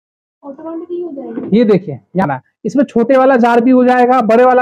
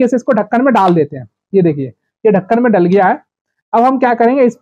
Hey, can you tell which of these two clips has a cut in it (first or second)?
first